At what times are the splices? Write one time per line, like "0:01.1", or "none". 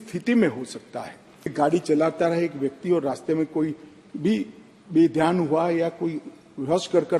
0:01.5